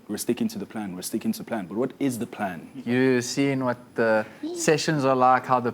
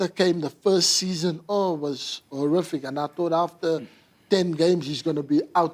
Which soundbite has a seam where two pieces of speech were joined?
first; 1 cut; at 2.8 s

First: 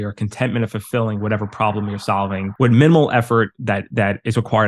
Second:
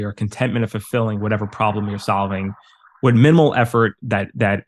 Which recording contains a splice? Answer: first; 1 cut; at 2.5 s

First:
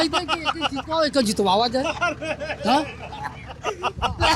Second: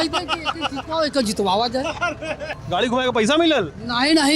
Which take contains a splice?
second; 1 cut; at 2.5 s

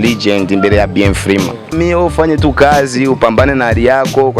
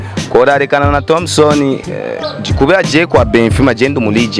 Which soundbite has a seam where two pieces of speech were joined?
first; 1 cut; at 1.7 s

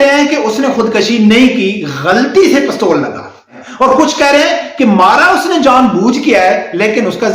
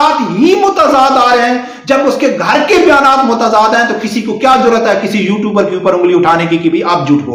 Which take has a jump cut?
first; 1 cut; at 3.6 s

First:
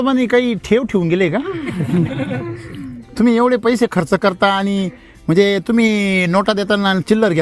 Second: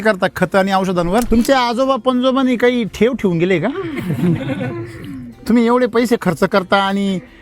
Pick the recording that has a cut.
second; 1 cut; at 1.3 s

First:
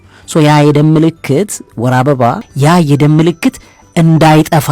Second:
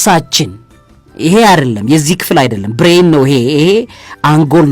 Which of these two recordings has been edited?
first; 1 cut; at 2.5 s

